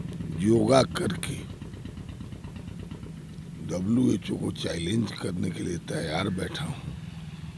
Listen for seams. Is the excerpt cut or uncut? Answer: uncut